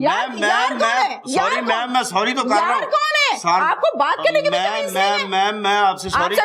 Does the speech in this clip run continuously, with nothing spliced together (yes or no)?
yes